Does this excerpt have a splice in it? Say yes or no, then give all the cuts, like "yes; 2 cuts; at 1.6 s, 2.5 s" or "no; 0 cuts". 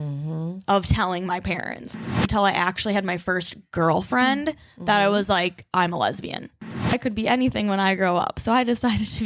yes; 2 cuts; at 2.0 s, 6.9 s